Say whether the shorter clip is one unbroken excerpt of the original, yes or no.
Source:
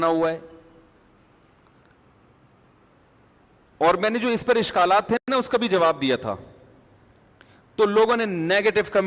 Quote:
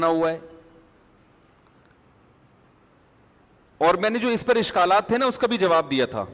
no